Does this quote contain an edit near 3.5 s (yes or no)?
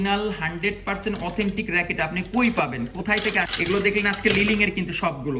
yes